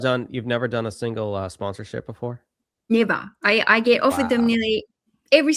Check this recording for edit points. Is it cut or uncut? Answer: uncut